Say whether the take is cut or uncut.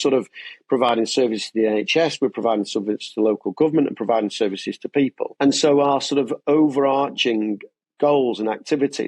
cut